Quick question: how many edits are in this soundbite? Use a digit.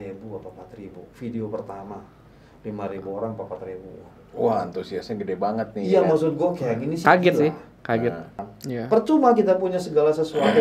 1